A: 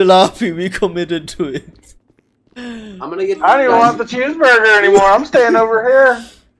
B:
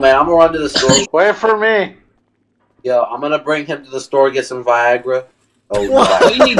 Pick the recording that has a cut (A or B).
B